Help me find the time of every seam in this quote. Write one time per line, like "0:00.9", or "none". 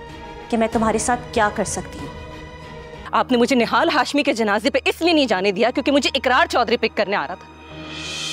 0:03.0